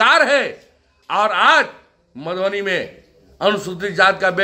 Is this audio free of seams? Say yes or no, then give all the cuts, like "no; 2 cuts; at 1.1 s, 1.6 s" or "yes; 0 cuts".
yes; 0 cuts